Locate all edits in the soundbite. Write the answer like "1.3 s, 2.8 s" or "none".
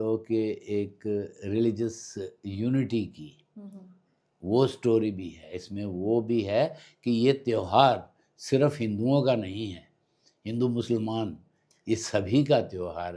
none